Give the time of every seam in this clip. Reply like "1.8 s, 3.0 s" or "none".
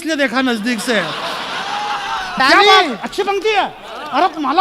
2.4 s